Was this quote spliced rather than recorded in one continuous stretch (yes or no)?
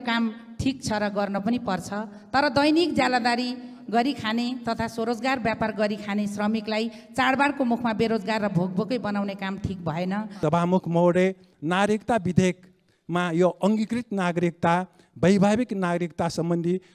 yes